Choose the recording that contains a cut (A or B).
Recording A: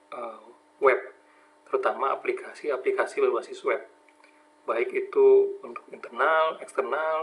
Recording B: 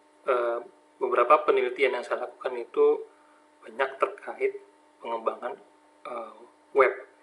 A